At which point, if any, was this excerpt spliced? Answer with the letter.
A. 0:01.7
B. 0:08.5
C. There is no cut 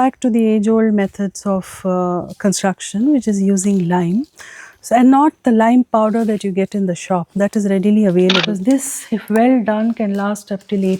B